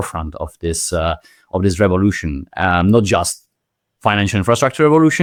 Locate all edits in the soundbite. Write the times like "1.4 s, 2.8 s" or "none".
none